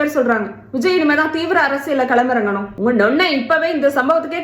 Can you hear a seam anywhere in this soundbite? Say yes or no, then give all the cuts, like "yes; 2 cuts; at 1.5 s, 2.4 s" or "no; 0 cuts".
yes; 1 cut; at 2.7 s